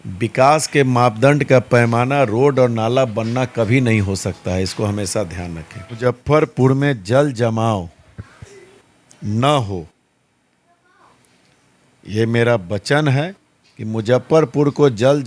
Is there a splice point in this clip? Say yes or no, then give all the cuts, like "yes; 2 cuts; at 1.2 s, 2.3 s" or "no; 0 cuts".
yes; 1 cut; at 6.0 s